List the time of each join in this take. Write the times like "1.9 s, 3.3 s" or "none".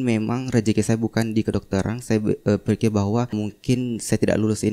none